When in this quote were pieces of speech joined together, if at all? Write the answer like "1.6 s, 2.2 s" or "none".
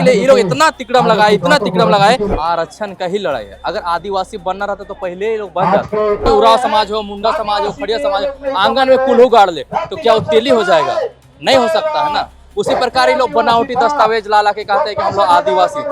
2.3 s, 6.2 s